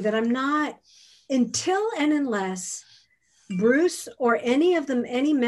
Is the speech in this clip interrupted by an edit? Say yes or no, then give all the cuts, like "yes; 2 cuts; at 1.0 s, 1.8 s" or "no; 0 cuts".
no; 0 cuts